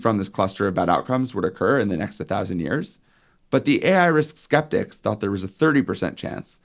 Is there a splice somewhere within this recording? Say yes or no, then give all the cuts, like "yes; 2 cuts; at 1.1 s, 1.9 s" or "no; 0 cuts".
no; 0 cuts